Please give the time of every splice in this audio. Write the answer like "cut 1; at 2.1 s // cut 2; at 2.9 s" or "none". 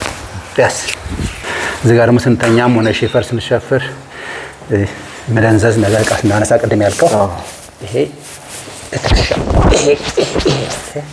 cut 1; at 1.4 s